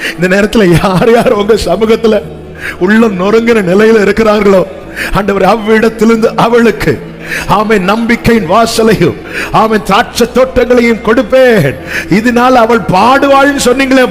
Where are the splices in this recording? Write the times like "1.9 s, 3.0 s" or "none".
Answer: none